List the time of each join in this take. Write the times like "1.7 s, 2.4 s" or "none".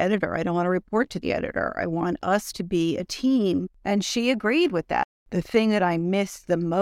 3.7 s, 5.1 s